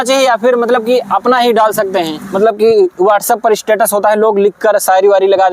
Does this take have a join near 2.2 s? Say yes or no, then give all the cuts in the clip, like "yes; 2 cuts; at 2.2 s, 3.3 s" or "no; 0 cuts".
yes; 1 cut; at 2.2 s